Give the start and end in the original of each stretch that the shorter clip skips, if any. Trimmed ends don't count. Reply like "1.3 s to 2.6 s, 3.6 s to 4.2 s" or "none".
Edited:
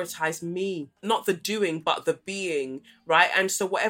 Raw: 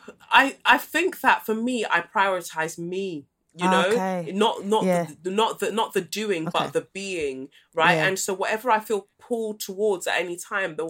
3.4 s to 5.7 s